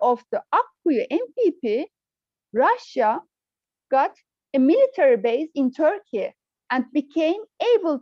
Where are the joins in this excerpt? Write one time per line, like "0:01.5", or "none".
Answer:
none